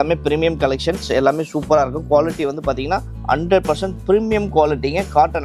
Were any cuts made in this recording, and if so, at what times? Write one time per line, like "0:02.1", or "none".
none